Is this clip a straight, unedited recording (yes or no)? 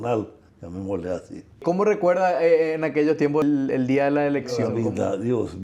no